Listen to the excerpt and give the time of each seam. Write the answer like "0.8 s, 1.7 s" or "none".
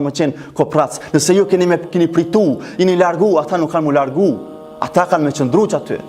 none